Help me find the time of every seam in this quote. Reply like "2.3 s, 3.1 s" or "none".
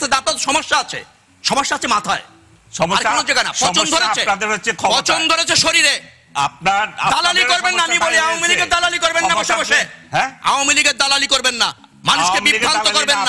none